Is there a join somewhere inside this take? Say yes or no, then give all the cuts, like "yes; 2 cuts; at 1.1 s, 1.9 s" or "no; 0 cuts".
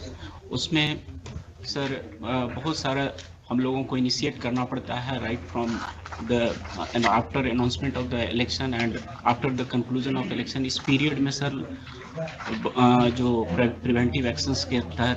no; 0 cuts